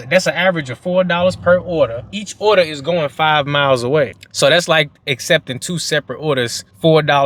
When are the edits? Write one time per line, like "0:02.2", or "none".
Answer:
none

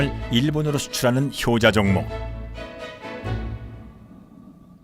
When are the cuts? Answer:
0:01.7

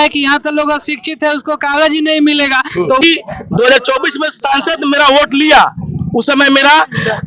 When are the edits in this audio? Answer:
0:03.0

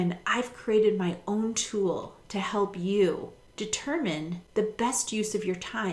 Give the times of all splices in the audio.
0:03.4
0:04.4

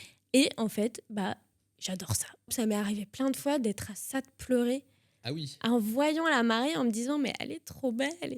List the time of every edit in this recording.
0:02.5

